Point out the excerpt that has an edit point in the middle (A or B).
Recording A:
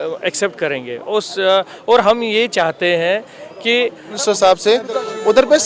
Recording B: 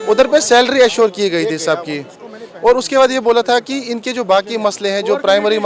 A